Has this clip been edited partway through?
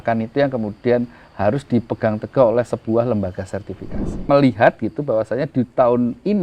yes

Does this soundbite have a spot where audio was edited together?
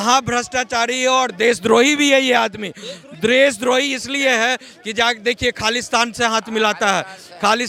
no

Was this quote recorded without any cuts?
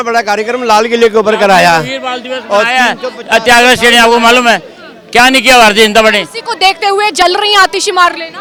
yes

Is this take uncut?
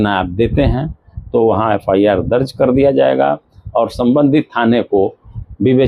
yes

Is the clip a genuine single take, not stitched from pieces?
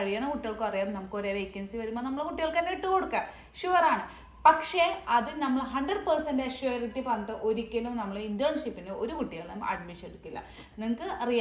yes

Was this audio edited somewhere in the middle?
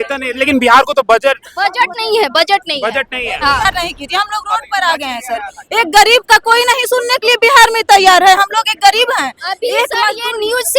yes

